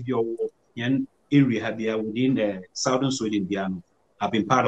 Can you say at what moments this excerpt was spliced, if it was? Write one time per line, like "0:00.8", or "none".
none